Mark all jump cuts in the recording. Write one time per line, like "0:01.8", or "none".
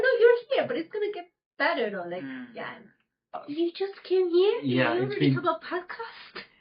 0:03.4